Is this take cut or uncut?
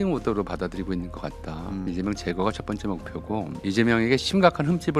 cut